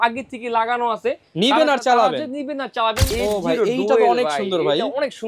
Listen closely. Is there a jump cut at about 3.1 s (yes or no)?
yes